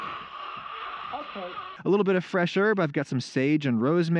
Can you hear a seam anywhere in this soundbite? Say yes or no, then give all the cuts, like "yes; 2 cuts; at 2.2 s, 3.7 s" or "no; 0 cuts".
yes; 1 cut; at 1.7 s